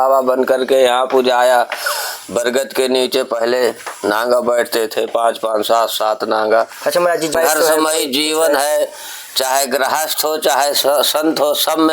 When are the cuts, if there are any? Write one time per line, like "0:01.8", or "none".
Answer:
0:07.3